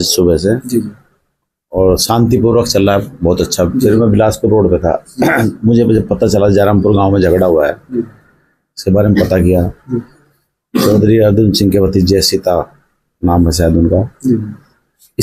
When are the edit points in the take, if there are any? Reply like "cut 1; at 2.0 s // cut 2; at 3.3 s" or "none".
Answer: none